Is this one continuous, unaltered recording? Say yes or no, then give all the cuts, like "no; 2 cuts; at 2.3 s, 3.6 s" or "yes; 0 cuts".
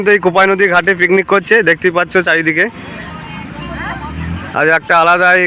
yes; 0 cuts